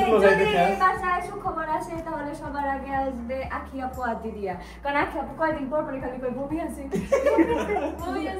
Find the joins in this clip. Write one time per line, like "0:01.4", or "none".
none